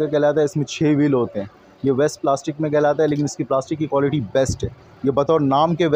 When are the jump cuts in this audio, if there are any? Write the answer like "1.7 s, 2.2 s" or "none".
none